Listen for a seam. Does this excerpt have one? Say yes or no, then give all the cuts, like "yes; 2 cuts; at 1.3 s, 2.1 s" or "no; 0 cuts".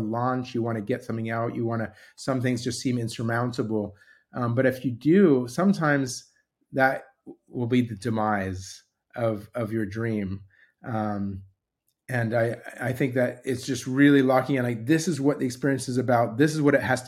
no; 0 cuts